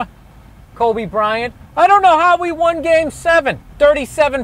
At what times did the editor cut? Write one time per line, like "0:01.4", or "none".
0:03.2